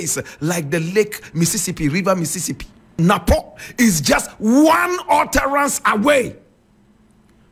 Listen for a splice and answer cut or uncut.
cut